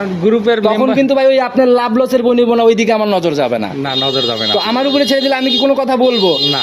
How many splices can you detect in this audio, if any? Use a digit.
0